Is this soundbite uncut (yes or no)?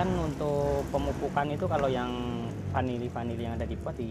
yes